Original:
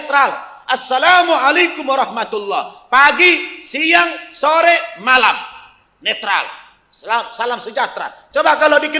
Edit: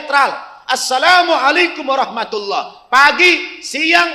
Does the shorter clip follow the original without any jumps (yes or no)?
yes